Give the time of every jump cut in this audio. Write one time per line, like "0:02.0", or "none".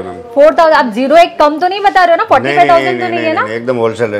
none